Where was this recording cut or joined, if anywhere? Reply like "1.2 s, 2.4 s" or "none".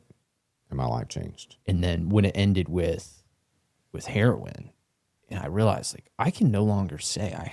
1.5 s

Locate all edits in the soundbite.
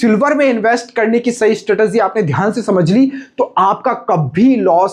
none

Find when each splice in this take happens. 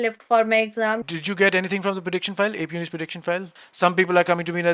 1.0 s, 3.5 s

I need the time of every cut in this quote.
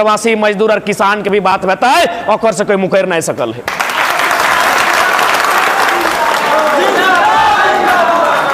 none

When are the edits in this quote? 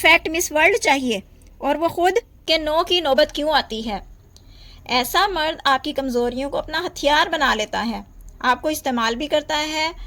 2.4 s

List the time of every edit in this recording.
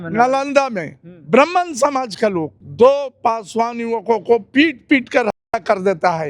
2.6 s

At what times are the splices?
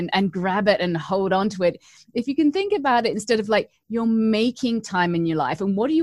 none

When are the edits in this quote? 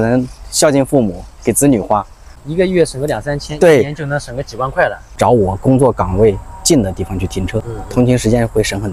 5.1 s, 7.8 s

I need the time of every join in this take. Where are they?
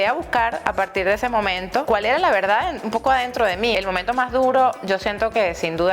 1.8 s, 3.7 s

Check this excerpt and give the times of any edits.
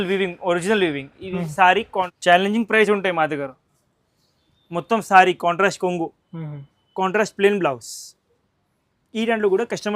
2.1 s

